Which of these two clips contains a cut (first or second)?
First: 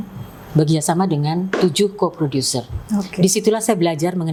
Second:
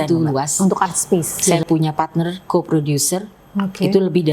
second